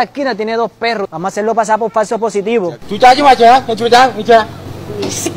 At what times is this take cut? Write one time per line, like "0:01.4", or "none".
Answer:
0:02.8